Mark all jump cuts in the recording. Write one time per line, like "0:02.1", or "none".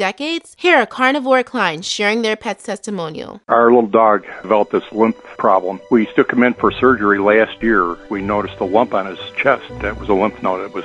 0:03.3